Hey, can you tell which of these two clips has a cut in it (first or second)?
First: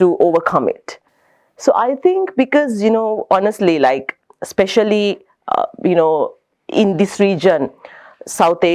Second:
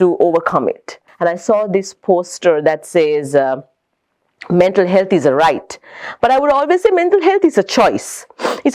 second